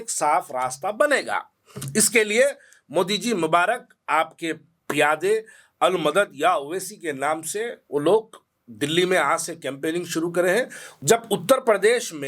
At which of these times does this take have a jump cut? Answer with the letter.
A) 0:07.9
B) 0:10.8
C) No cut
B